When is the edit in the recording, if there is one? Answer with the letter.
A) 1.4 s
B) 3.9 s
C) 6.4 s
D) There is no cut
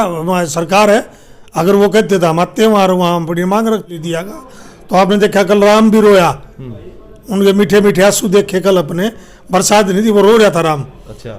B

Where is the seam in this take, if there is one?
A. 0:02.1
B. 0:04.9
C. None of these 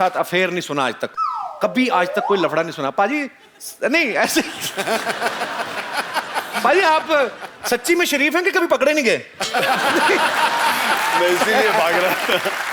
C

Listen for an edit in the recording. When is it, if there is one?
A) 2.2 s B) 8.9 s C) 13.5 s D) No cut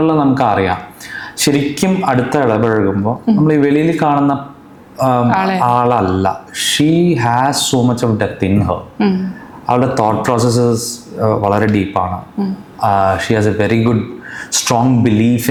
D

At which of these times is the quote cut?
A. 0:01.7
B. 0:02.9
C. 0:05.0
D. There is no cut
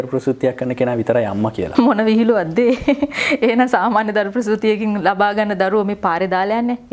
A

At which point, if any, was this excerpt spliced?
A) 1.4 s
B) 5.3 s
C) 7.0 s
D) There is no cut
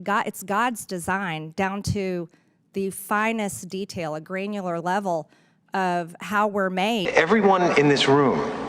C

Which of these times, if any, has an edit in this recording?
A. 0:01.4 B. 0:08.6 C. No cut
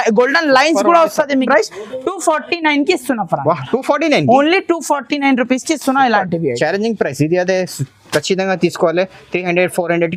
A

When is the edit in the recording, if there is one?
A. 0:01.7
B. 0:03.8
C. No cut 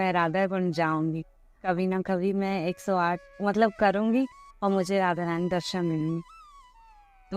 A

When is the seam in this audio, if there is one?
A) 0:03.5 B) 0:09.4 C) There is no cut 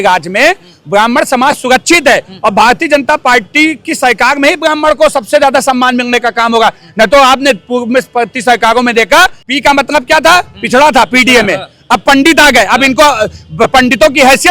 B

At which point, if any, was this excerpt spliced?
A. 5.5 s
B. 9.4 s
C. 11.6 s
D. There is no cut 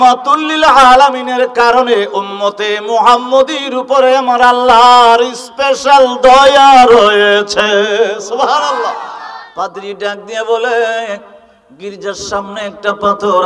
B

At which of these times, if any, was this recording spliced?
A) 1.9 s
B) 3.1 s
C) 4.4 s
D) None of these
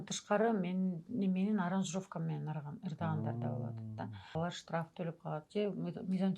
C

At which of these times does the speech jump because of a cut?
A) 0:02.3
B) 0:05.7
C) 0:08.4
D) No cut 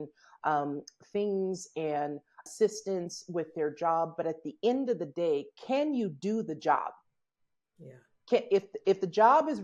A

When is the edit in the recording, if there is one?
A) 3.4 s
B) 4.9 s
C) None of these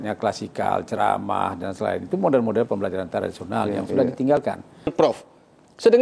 B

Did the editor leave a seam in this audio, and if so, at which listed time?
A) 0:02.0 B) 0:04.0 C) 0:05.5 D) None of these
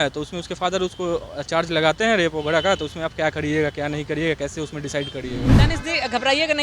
C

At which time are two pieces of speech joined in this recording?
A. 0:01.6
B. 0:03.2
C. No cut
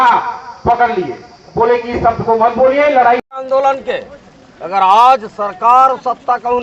B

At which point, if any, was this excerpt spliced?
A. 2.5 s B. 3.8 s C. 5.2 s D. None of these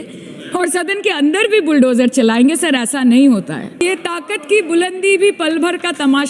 B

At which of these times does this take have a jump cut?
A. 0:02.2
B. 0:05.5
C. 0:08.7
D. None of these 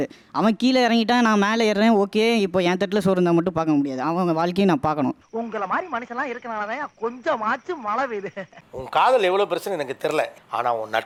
D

